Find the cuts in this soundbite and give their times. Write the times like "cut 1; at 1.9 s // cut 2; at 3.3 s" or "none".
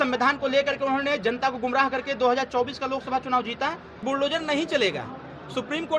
cut 1; at 4.0 s